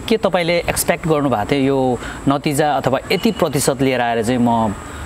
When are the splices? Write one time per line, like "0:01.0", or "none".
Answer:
none